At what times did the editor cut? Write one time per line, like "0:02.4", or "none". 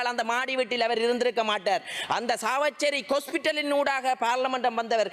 none